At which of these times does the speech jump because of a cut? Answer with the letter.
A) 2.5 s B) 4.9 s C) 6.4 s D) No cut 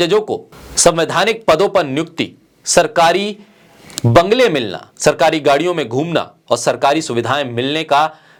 D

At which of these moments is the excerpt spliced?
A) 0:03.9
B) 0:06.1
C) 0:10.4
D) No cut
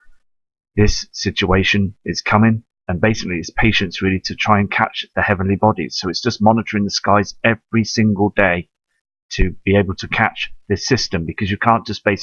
A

